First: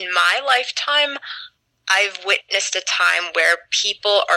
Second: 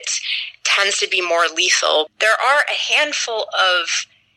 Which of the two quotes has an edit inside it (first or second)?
second